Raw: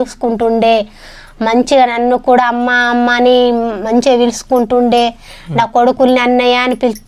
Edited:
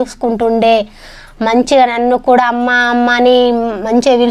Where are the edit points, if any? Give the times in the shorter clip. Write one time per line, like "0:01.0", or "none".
none